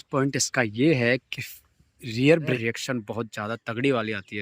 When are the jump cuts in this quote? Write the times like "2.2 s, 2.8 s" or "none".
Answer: 2.5 s